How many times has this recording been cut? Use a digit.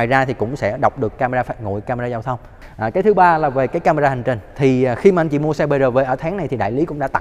1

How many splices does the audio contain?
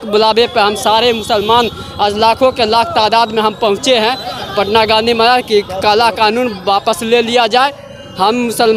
0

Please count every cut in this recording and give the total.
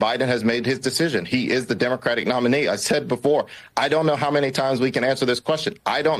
0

